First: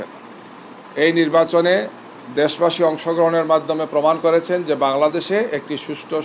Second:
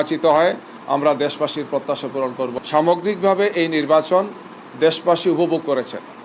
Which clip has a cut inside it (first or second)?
second